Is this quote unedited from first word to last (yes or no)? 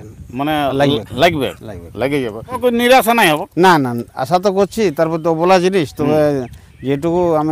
no